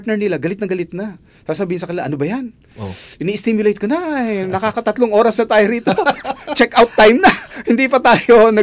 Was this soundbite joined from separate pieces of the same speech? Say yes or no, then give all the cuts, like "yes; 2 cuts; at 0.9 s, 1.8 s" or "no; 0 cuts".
no; 0 cuts